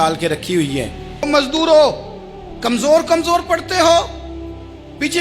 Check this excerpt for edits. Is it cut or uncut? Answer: cut